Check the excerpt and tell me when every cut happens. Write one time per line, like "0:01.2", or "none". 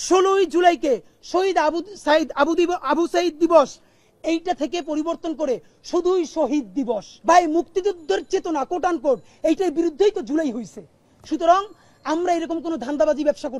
0:07.1